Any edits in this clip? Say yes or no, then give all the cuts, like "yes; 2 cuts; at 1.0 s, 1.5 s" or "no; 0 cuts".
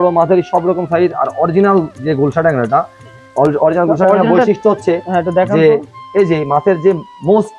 no; 0 cuts